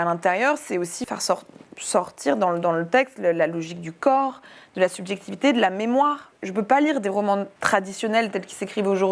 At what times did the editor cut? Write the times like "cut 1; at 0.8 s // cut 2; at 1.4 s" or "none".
cut 1; at 1.0 s // cut 2; at 6.3 s // cut 3; at 7.6 s